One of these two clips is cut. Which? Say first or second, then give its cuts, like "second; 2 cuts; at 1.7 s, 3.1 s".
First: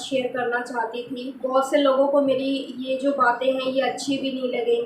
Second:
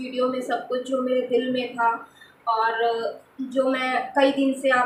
first; 1 cut; at 1.3 s